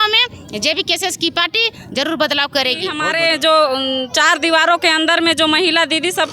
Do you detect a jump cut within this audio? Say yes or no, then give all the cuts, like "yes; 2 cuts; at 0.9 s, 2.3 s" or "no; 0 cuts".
yes; 1 cut; at 3.0 s